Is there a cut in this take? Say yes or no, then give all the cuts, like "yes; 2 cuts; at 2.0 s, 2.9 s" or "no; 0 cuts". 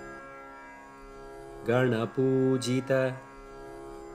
yes; 2 cuts; at 1.7 s, 3.2 s